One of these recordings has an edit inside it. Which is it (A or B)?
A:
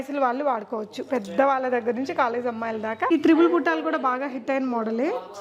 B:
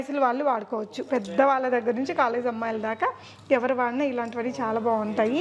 A